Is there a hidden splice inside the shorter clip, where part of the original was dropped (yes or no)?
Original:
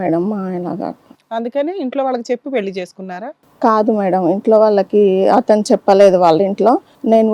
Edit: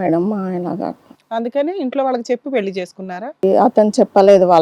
yes